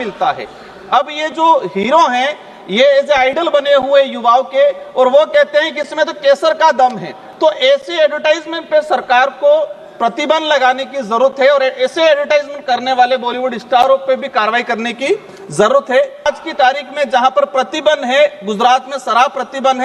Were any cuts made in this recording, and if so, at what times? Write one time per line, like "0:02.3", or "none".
0:16.2

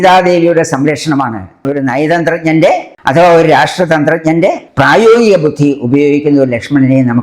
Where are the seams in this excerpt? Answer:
0:01.6

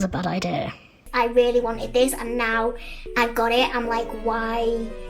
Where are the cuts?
0:01.1

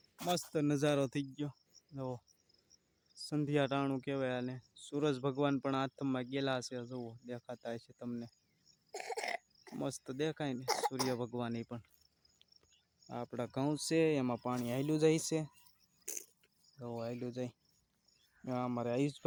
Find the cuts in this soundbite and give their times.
none

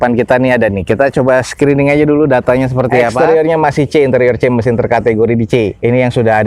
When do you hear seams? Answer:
0:03.1

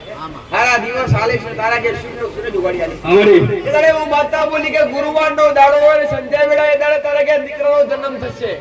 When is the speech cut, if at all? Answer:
none

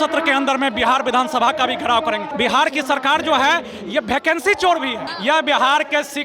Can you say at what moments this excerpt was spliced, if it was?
0:02.3
0:05.1

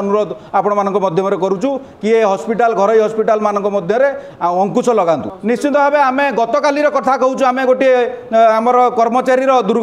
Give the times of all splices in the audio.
none

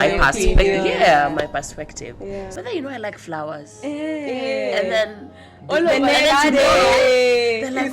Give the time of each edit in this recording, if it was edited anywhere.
0:02.5

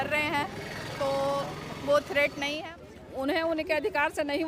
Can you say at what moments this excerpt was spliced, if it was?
0:02.7

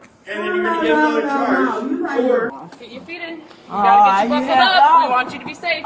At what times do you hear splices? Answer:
0:02.6

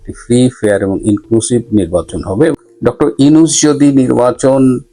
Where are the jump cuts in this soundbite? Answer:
0:02.5

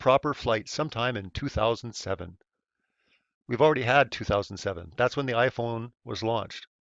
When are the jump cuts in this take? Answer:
0:03.1

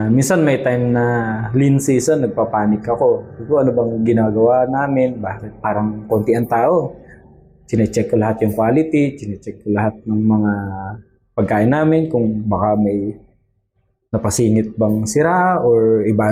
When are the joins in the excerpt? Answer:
none

